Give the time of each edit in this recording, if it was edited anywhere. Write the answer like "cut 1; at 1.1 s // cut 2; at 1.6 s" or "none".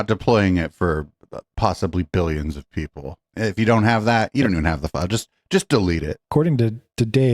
cut 1; at 3.2 s // cut 2; at 6.2 s